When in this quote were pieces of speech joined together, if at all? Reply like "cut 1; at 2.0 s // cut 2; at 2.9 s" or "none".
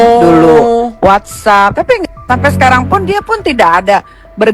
cut 1; at 2.2 s